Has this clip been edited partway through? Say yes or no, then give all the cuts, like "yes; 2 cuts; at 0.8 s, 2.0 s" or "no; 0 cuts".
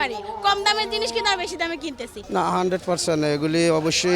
yes; 1 cut; at 2.1 s